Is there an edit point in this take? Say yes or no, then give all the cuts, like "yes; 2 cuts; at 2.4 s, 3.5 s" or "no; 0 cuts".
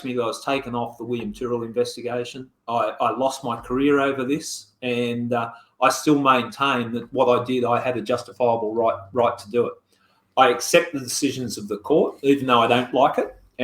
no; 0 cuts